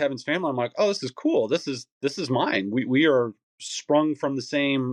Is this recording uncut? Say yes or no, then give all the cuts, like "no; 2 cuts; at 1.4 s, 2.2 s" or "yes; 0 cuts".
yes; 0 cuts